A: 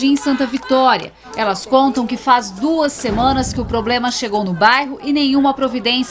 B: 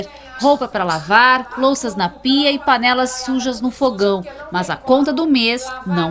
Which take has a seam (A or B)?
A